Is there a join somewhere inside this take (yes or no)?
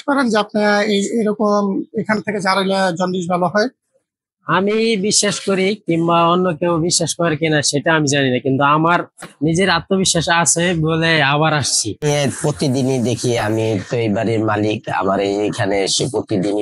yes